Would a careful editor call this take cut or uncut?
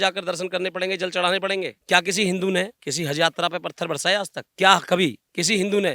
cut